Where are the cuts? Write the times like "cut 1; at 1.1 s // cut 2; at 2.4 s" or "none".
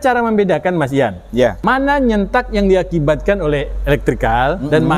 cut 1; at 1.6 s